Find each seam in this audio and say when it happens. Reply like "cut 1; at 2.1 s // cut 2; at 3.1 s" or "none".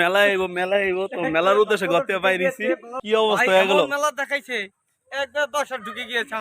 cut 1; at 2.9 s